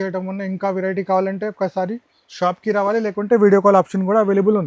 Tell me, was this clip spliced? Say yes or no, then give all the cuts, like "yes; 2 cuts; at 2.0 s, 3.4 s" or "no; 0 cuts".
no; 0 cuts